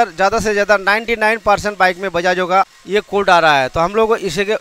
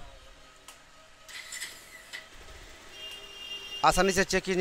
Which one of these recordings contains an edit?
first; 1 cut; at 2.7 s

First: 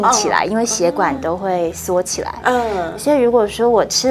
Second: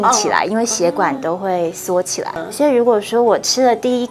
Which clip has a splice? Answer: second; 1 cut; at 2.4 s

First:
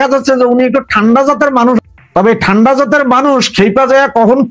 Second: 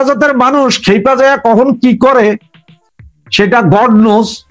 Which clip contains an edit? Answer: first; 1 cut; at 1.8 s

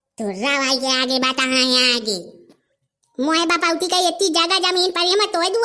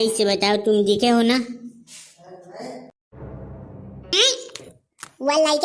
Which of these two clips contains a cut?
second; 1 cut; at 4.1 s

